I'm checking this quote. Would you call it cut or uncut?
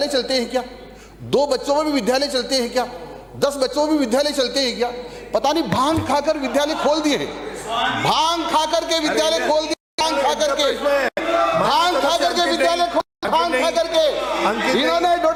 uncut